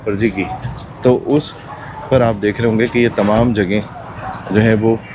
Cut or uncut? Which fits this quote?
uncut